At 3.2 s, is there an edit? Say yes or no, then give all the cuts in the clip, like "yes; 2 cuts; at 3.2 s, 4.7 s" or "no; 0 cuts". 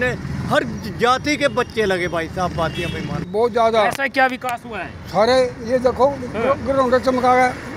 yes; 1 cut; at 3.2 s